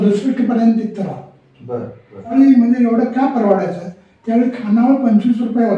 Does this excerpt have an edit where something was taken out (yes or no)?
yes